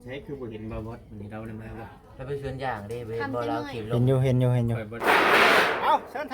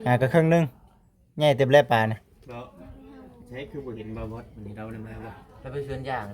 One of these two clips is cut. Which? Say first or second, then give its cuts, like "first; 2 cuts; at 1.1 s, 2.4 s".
first; 1 cut; at 5.0 s